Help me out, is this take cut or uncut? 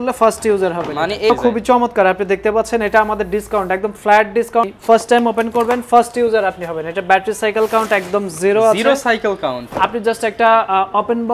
cut